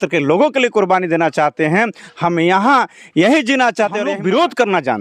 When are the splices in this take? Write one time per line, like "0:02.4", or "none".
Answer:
0:04.0